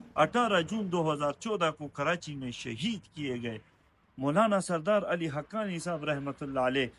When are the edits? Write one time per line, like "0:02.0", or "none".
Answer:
0:04.1